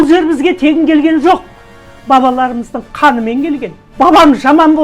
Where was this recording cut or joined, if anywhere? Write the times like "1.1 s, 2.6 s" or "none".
3.8 s